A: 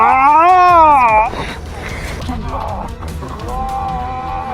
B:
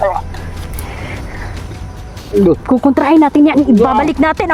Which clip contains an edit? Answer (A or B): A